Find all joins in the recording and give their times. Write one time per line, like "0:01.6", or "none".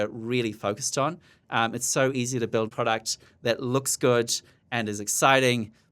0:02.7